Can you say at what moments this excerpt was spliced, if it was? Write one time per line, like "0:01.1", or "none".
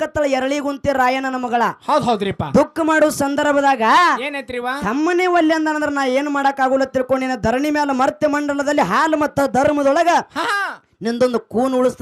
none